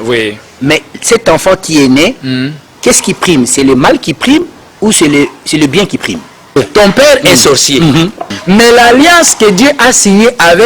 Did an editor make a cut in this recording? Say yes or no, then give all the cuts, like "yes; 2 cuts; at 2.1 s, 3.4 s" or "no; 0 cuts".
yes; 2 cuts; at 6.6 s, 8.4 s